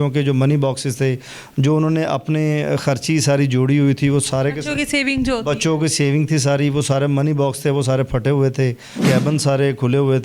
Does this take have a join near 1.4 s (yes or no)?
no